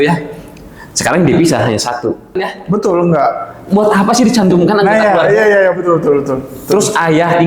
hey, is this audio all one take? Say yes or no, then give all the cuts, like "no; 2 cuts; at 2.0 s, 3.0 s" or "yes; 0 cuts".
no; 1 cut; at 2.5 s